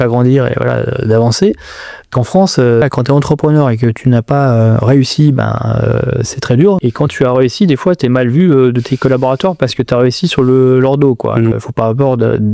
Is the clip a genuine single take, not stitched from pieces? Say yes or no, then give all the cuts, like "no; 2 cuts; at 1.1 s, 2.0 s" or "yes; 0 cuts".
no; 3 cuts; at 2.8 s, 6.8 s, 11.5 s